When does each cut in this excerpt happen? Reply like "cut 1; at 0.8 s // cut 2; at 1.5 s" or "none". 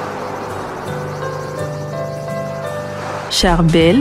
cut 1; at 2.8 s